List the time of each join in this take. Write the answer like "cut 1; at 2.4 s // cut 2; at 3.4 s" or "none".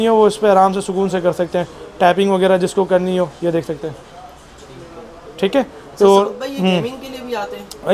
none